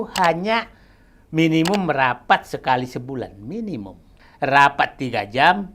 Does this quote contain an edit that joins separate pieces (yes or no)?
yes